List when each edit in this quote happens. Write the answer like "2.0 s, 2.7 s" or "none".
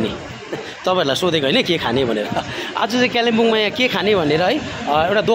none